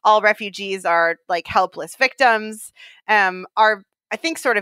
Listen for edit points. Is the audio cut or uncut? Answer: uncut